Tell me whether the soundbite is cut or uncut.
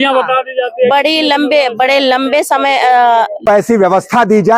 cut